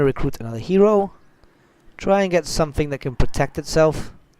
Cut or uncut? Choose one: cut